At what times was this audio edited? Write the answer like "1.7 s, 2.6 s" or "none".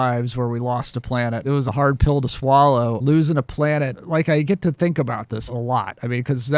1.4 s, 3.0 s, 4.0 s, 5.5 s